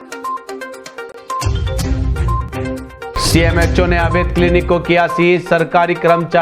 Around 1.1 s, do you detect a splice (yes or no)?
yes